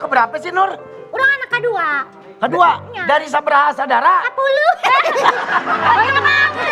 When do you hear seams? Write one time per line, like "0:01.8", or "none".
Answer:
none